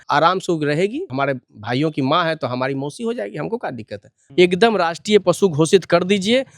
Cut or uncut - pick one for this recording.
cut